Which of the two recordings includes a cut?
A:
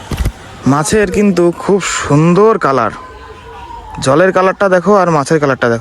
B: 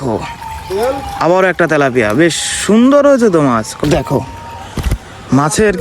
B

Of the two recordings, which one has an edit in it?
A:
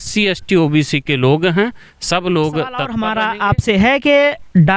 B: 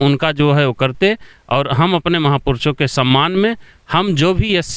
A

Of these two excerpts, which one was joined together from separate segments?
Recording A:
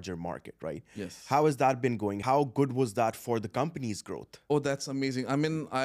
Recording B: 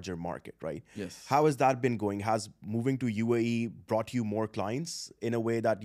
A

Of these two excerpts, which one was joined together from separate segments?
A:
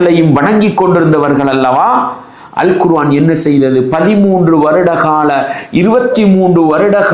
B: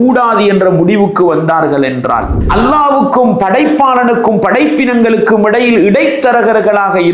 B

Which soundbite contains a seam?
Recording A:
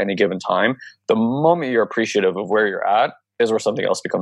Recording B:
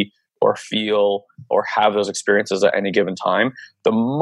A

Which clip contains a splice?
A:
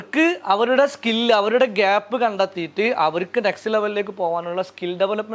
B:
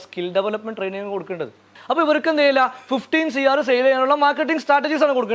B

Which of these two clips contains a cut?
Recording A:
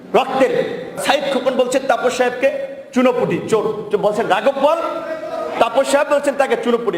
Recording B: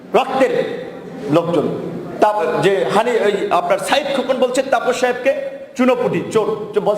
A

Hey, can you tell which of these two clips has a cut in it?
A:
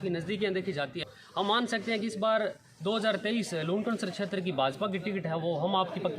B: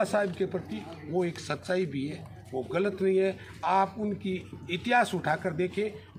A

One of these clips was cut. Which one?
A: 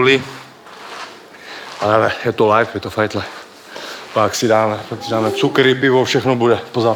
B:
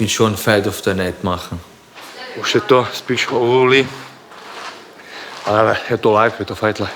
B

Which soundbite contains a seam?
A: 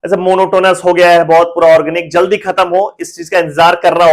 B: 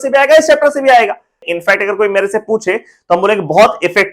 B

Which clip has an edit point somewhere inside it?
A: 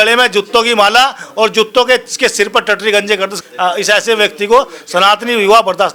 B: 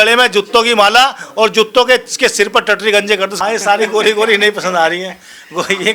B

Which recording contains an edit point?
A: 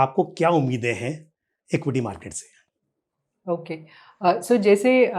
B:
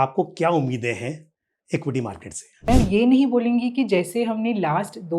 B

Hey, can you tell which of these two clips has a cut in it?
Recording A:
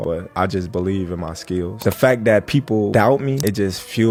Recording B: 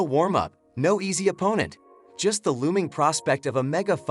B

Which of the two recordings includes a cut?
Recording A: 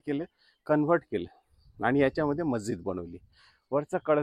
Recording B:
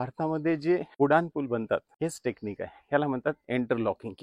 B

